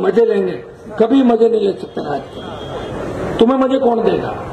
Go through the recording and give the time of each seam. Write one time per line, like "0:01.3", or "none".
none